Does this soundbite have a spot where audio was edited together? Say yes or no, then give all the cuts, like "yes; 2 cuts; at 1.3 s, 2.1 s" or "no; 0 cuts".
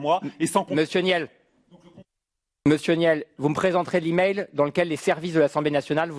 no; 0 cuts